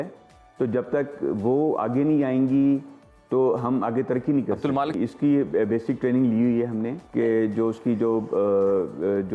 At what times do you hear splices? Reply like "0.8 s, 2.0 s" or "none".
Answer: 4.9 s, 7.0 s